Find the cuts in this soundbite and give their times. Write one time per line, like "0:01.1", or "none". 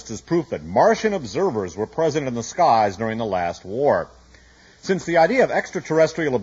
none